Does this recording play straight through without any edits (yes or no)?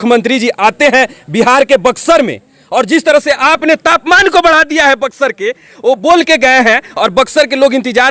yes